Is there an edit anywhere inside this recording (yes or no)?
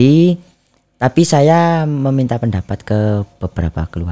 no